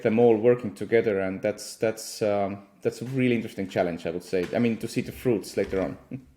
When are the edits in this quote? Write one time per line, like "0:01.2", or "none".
none